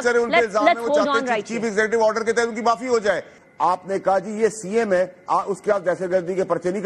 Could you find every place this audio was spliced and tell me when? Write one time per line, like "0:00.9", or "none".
0:03.3